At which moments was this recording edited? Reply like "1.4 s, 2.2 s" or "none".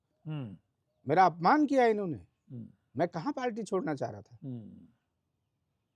none